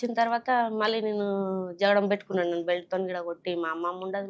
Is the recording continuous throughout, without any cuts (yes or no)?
yes